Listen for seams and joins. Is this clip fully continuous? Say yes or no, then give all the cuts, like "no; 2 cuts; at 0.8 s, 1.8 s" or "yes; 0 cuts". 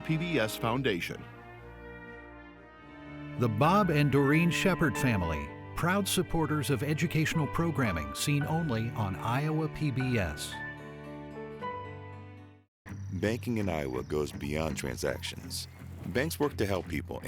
no; 2 cuts; at 1.2 s, 2.9 s